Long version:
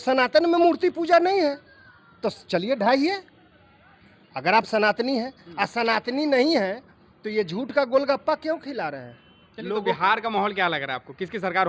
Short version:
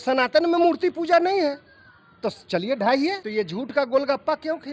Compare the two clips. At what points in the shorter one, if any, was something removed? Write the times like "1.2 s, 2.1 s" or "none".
3.2 s

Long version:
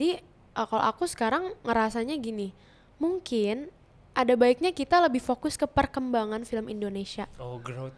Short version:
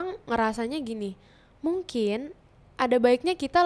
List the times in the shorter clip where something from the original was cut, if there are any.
none

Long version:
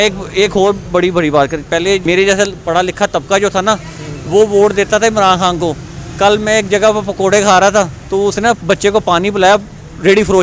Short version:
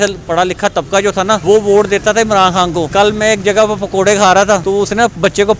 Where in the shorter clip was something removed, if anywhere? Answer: 1.4 s, 2.9 s, 4.6 s

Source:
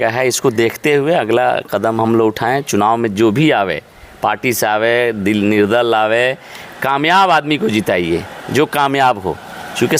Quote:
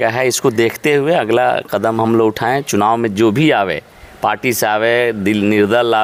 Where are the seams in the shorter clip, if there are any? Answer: none

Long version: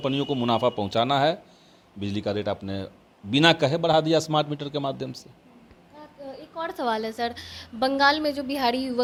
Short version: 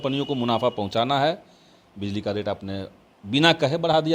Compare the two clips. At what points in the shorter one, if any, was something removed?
none

